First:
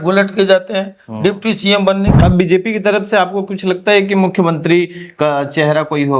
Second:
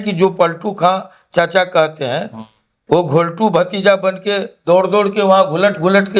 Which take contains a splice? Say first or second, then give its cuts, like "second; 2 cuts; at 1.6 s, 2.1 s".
first; 1 cut; at 2.1 s